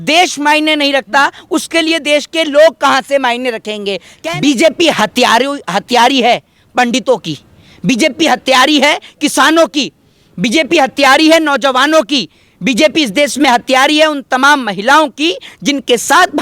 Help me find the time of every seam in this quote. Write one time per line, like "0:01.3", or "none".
0:04.0